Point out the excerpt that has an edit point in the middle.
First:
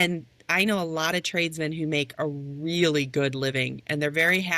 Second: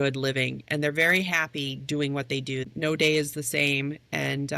second; 1 cut; at 2.6 s

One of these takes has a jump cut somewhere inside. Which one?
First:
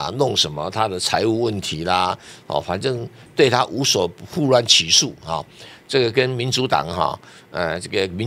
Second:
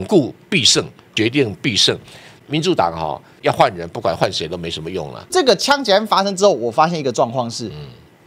second; 4 cuts; at 1.0 s, 2.3 s, 3.3 s, 5.3 s

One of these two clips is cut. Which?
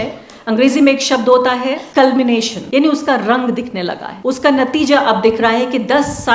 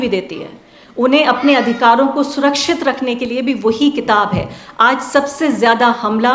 first; 3 cuts; at 1.8 s, 2.6 s, 4.0 s

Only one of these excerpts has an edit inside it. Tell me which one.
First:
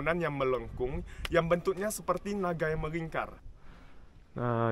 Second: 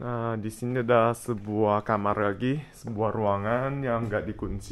first; 1 cut; at 3.5 s

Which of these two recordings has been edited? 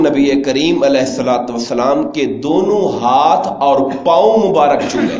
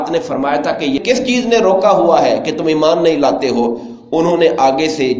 second; 1 cut; at 1.0 s

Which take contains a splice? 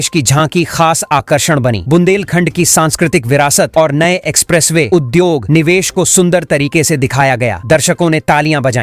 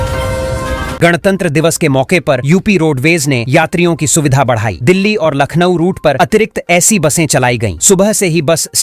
second; 1 cut; at 0.9 s

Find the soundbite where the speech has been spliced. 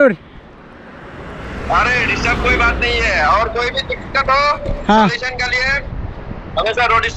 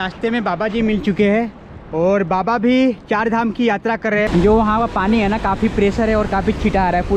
second; 1 cut; at 4.3 s

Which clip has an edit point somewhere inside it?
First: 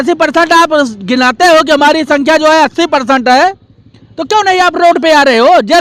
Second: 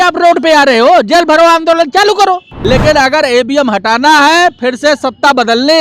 second; 1 cut; at 2.5 s

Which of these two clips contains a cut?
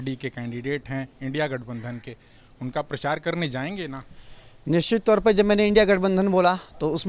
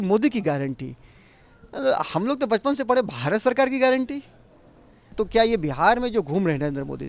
second; 1 cut; at 5.1 s

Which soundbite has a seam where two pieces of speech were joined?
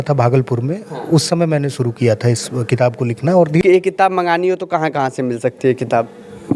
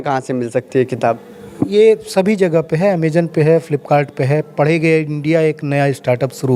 first; 1 cut; at 3.6 s

